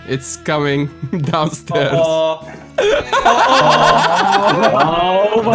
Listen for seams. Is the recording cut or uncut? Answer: uncut